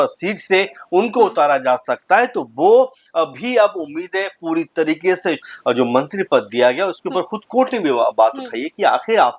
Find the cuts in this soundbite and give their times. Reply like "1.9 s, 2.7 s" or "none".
5.5 s

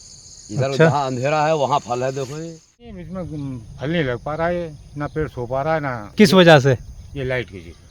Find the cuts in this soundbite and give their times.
3.0 s, 6.0 s

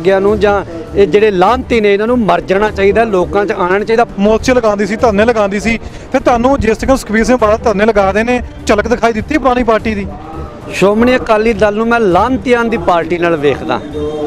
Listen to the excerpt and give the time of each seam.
4.1 s

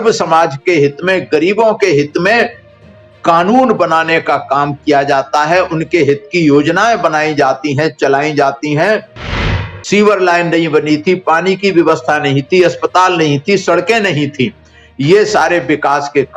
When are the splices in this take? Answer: 9.4 s

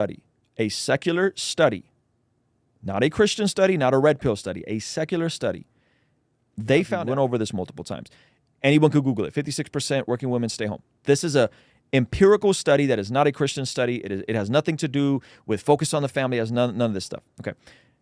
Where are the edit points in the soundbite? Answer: 7.0 s

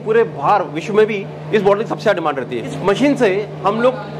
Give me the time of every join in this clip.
2.8 s

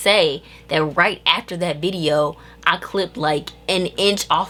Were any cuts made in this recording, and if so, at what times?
none

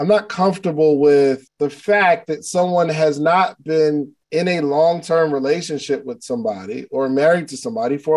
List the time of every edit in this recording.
1.5 s, 4.2 s

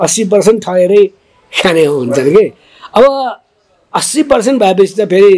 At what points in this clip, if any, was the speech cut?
none

